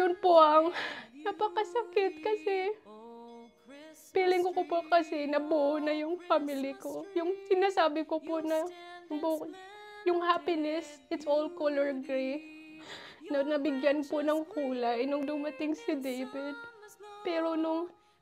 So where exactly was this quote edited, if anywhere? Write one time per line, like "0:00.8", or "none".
none